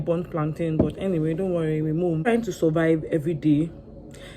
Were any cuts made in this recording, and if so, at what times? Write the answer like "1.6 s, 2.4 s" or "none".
2.3 s